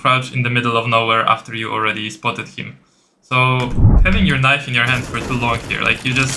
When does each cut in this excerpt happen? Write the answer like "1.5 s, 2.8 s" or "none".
3.9 s